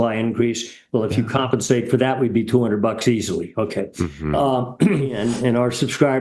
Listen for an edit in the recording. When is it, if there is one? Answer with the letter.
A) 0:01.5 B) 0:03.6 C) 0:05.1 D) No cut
C